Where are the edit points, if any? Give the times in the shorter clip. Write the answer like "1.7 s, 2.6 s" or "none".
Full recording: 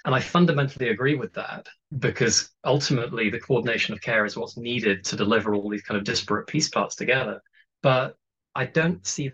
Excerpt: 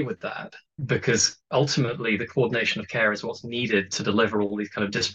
none